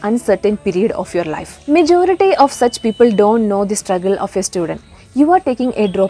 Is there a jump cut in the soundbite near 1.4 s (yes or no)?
yes